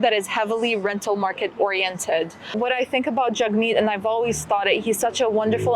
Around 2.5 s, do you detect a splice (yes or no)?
yes